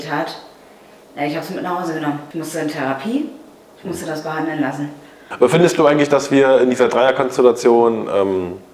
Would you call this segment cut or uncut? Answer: cut